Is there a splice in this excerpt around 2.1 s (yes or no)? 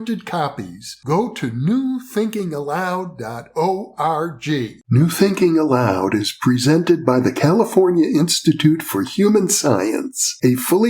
no